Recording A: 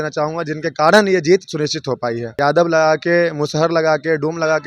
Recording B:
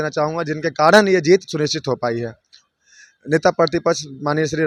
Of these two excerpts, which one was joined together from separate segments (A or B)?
A